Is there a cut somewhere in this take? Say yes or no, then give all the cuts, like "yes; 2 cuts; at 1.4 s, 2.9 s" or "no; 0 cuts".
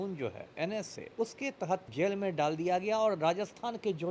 yes; 2 cuts; at 1.0 s, 1.9 s